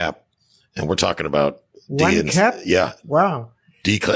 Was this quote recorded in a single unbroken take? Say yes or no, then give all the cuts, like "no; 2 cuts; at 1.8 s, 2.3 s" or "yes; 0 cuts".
yes; 0 cuts